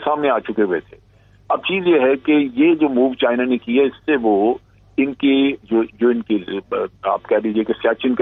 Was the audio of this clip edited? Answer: no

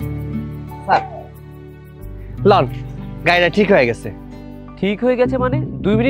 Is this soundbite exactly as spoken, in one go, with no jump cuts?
yes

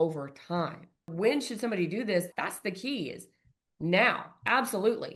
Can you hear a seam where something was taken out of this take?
yes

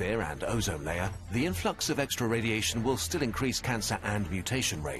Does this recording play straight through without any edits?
yes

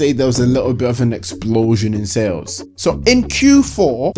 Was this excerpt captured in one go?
no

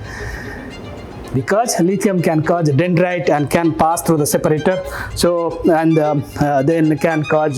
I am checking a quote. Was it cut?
no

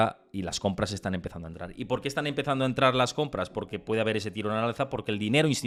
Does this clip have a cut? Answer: no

